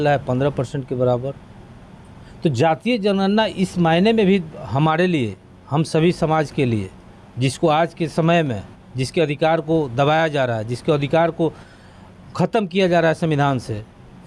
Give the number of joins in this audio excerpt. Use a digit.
0